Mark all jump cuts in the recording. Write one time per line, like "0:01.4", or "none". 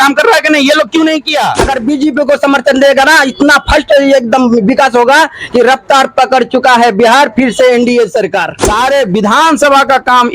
0:01.6
0:08.6